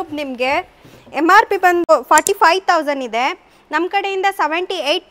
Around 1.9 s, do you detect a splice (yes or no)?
yes